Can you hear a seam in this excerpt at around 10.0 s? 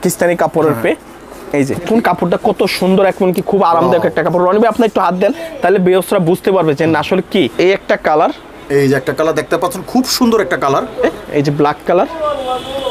no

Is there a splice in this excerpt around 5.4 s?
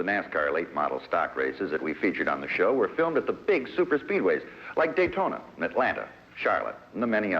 no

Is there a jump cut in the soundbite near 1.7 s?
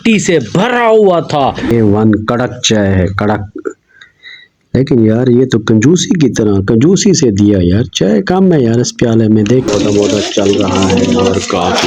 yes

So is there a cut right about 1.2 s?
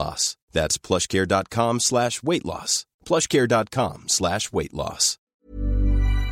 no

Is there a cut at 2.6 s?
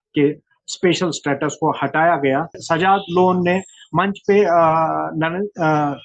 yes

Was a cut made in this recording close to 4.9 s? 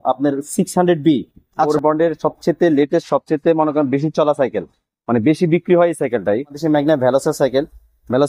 no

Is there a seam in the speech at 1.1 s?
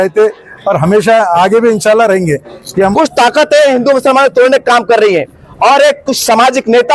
no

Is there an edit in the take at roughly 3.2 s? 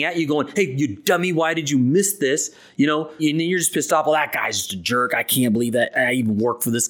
yes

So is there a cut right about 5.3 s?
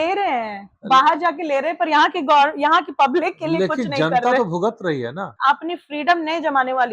yes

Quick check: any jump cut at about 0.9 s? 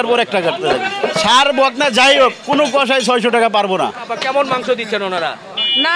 yes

